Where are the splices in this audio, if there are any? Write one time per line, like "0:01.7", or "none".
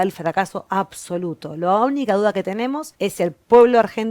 0:02.9